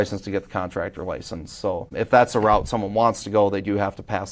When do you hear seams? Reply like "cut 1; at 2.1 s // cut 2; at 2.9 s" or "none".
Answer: cut 1; at 1.9 s